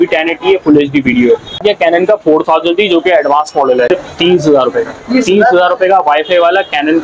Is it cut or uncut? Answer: cut